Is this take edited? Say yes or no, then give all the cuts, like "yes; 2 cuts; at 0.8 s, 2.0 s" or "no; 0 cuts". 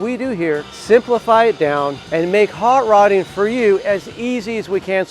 no; 0 cuts